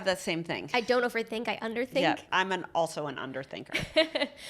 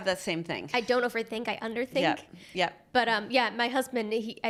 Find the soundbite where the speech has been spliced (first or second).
first